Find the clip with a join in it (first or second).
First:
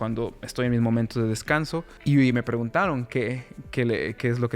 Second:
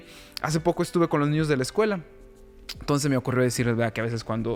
first